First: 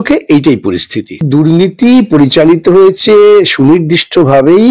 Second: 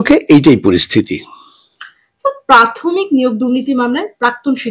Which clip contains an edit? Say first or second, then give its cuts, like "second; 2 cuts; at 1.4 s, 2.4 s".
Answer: first; 1 cut; at 1.3 s